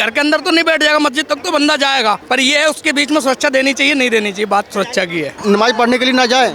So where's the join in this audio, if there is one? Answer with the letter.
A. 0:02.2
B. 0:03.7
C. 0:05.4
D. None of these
C